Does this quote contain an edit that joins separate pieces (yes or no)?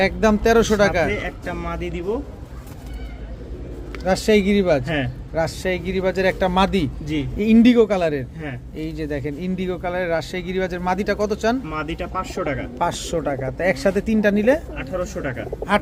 no